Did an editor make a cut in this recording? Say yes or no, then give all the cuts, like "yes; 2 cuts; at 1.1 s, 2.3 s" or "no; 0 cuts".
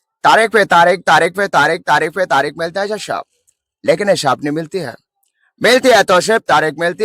no; 0 cuts